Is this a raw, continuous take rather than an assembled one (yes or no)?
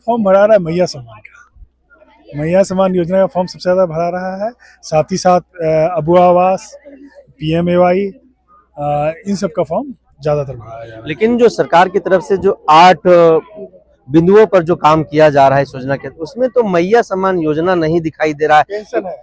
yes